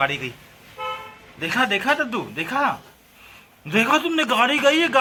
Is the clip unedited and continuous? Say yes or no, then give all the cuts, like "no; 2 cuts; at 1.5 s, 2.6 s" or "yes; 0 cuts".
yes; 0 cuts